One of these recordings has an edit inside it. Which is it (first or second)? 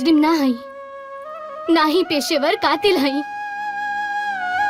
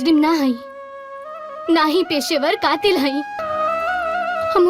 second